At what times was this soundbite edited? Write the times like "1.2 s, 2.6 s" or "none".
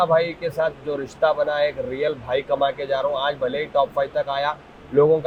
none